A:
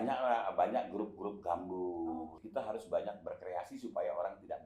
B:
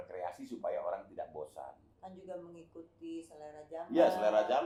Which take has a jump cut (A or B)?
A